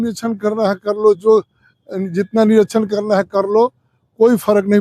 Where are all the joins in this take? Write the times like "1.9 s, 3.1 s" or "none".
none

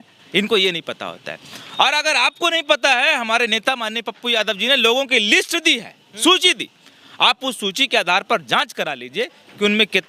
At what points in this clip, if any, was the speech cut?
none

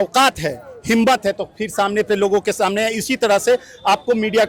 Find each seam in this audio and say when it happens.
none

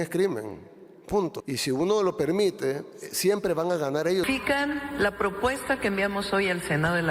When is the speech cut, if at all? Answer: 1.4 s, 4.3 s

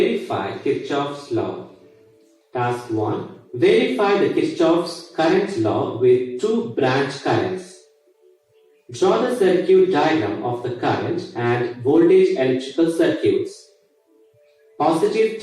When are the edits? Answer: none

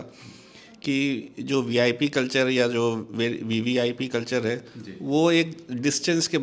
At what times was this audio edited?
none

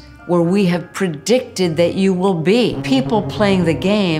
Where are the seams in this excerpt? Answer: 2.8 s

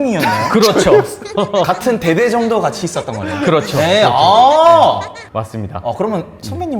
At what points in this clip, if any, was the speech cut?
none

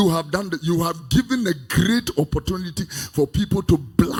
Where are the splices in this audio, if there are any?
none

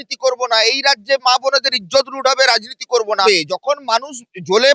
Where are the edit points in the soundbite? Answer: 3.2 s

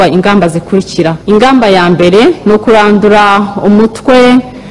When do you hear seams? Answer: 1.2 s

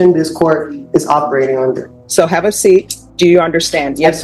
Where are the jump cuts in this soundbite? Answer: 1.9 s, 3.0 s

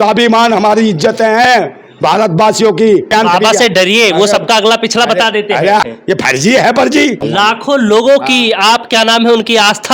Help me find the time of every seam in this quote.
3.1 s, 5.8 s, 7.2 s

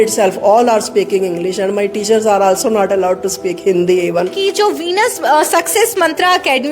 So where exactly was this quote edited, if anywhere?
4.3 s

